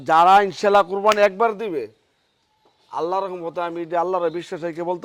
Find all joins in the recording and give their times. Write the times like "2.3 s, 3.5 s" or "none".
none